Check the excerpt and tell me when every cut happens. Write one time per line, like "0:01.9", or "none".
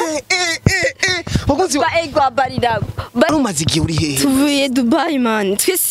0:03.3